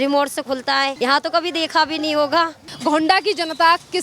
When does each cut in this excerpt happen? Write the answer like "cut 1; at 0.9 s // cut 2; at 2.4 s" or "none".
cut 1; at 0.9 s // cut 2; at 2.7 s